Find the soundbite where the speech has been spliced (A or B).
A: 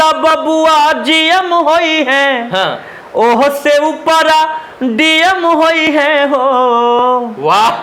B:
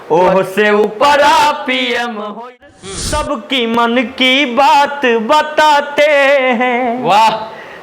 B